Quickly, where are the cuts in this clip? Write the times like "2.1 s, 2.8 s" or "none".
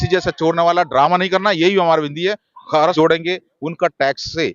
2.9 s

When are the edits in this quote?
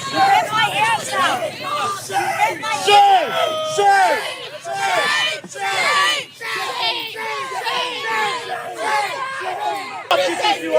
none

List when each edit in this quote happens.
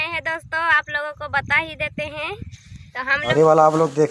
3.2 s

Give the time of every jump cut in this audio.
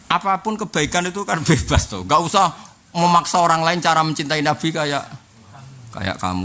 none

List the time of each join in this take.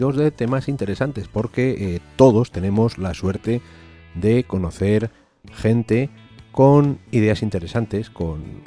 2.5 s

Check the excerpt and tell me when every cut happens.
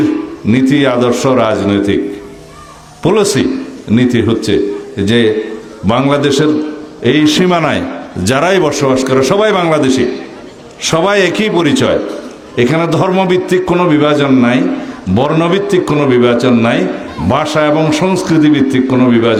none

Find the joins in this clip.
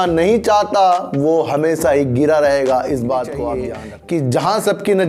3.7 s

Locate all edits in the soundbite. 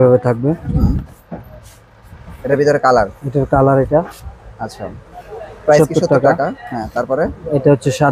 2.3 s

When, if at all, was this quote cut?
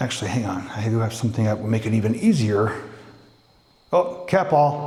none

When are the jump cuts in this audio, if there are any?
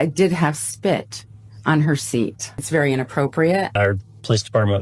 2.6 s, 3.7 s

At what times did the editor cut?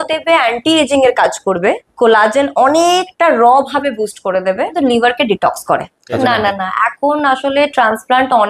1.9 s, 4.7 s, 6.2 s

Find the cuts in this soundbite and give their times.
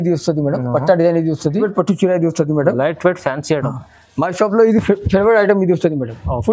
1.6 s

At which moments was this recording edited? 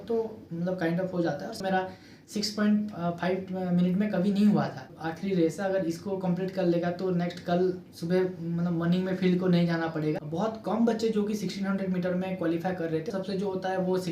1.6 s, 4.9 s, 10.2 s, 13.1 s

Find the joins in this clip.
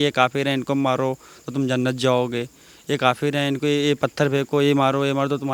none

